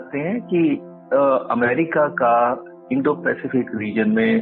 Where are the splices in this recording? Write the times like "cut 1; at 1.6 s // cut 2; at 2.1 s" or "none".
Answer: cut 1; at 0.9 s // cut 2; at 2.7 s